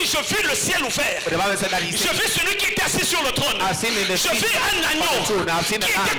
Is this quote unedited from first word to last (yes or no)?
yes